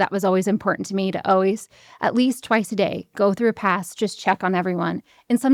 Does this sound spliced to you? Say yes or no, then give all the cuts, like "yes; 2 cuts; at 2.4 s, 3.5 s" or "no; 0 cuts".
no; 0 cuts